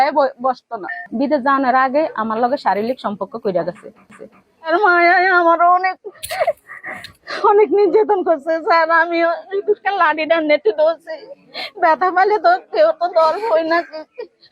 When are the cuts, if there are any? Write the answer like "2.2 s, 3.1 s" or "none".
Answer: 1.1 s, 4.3 s

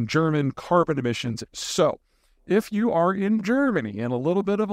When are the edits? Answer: 1.3 s

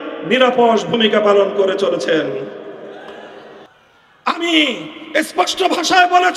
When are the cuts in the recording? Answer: 3.6 s

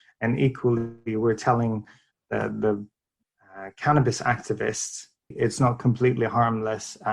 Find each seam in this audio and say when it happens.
5.3 s

